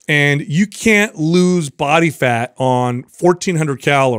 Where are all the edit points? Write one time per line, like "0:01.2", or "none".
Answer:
none

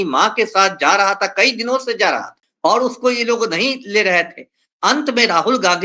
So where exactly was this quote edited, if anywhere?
0:02.4

